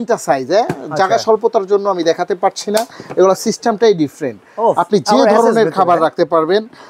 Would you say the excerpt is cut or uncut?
uncut